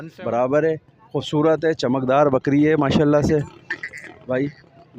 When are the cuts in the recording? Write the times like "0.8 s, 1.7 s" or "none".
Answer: none